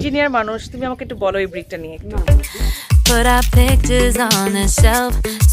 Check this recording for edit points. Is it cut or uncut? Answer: cut